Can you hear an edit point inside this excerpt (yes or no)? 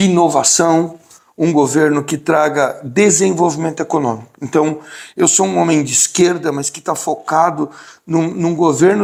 no